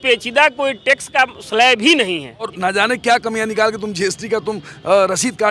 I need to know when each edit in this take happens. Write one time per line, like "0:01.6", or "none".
0:02.5